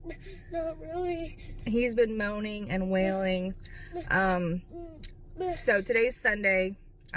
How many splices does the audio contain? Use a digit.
0